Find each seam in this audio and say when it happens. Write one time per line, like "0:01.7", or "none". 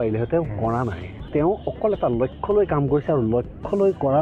0:01.2